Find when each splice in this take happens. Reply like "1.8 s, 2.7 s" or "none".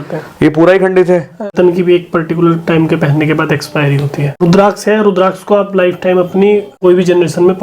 1.5 s, 4.4 s, 6.7 s